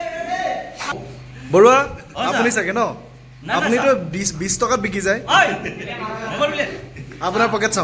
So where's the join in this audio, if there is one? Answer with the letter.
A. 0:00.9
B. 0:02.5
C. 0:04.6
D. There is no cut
A